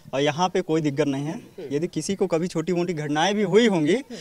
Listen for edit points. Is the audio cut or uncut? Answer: uncut